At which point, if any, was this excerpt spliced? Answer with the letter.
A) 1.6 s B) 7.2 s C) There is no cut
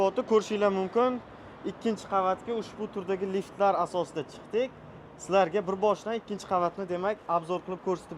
C